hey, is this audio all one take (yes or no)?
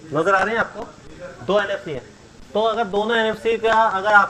yes